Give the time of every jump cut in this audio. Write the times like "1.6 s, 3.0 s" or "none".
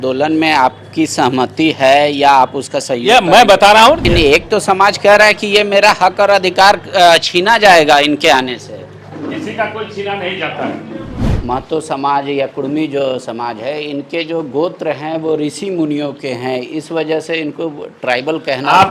4.1 s, 11.3 s